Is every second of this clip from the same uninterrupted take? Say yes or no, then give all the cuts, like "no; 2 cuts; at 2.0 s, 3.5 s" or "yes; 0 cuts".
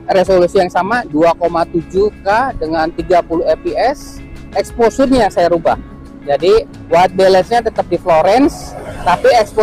yes; 0 cuts